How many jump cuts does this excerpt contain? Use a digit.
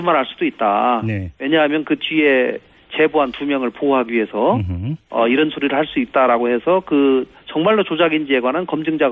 1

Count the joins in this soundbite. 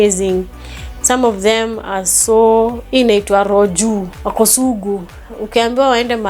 2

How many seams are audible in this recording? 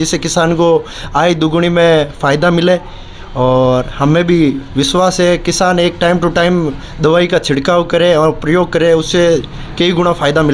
0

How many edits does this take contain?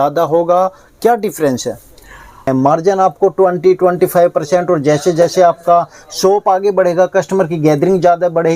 1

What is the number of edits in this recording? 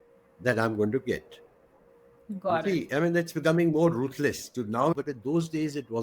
1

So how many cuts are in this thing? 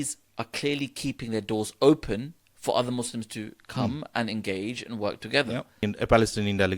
1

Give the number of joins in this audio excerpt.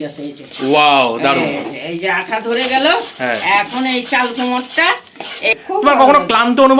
1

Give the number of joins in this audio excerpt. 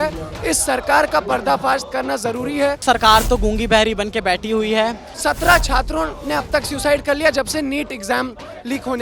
2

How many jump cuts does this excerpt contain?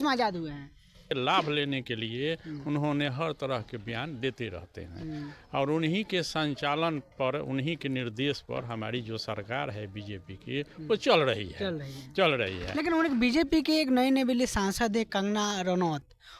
1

